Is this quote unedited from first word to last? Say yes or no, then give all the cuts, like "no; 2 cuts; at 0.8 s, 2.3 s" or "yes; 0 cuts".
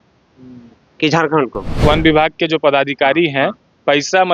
no; 1 cut; at 1.8 s